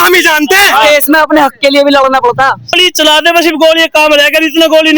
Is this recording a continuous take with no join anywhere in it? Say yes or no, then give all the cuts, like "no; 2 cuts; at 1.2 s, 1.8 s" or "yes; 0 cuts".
no; 1 cut; at 2.8 s